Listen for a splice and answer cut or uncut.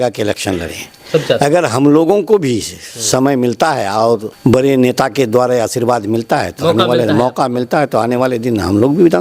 cut